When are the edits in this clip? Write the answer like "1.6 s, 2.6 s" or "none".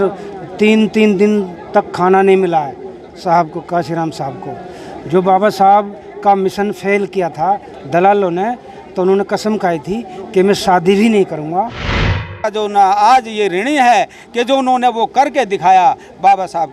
12.3 s